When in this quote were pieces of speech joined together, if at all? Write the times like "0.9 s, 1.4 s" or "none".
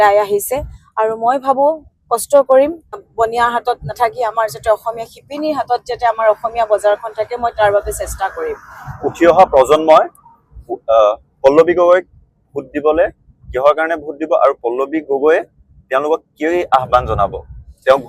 3.0 s